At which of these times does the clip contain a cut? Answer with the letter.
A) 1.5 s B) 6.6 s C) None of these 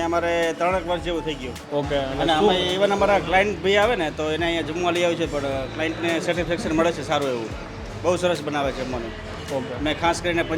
A